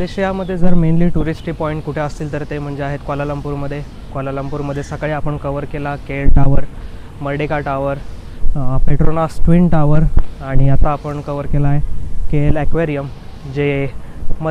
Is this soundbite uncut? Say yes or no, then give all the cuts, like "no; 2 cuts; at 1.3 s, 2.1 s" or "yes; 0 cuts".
yes; 0 cuts